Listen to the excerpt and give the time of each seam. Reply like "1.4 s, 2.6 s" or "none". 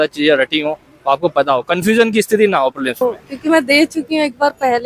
3.0 s